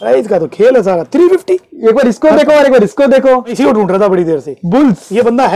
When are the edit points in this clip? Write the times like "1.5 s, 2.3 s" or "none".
3.5 s